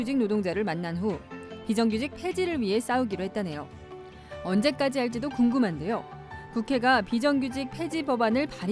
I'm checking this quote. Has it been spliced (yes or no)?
yes